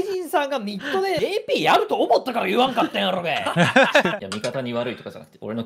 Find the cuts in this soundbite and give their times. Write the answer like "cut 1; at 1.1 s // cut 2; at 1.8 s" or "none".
cut 1; at 1.2 s // cut 2; at 4.2 s